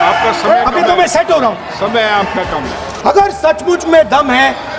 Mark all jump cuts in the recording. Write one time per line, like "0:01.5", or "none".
0:02.8